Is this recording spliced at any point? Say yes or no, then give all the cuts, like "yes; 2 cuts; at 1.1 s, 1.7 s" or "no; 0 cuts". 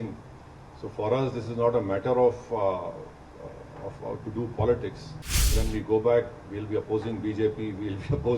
yes; 1 cut; at 5.5 s